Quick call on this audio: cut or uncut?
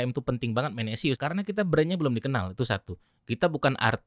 cut